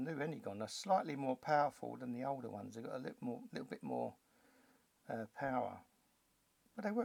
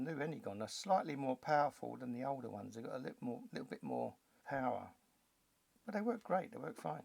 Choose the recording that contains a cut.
second; 1 cut; at 4.4 s

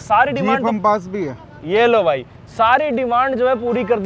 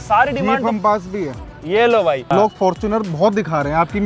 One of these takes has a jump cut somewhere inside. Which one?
second; 1 cut; at 2.2 s

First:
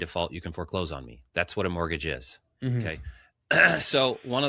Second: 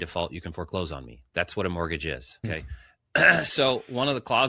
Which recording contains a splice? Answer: second; 1 cut; at 2.4 s

